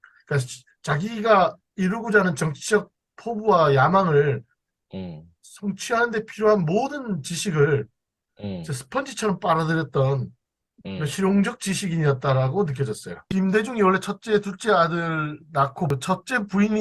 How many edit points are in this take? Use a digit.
2